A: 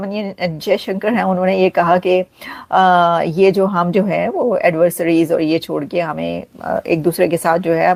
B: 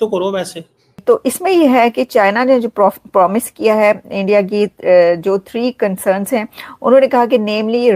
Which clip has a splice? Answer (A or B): B